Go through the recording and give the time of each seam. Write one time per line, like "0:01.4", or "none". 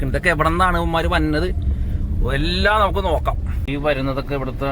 0:03.5